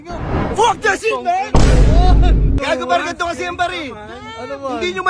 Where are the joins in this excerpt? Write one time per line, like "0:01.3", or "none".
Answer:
0:02.6